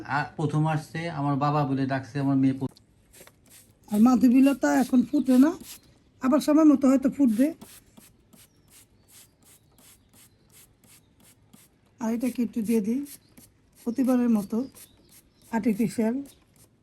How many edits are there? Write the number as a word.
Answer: one